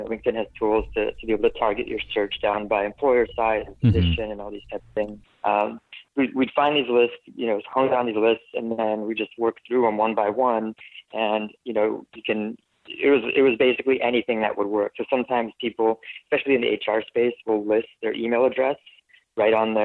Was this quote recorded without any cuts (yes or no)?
yes